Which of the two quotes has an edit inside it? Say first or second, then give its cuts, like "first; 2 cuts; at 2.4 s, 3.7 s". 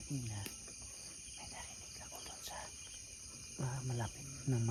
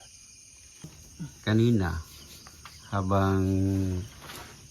second; 1 cut; at 1.0 s